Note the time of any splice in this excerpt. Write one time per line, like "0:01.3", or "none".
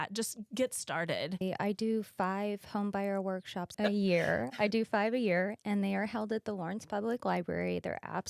0:01.4
0:03.7